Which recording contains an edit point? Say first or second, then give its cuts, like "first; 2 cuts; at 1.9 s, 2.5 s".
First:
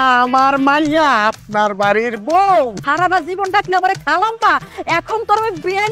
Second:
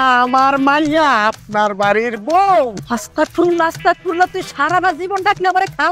first; 1 cut; at 2.8 s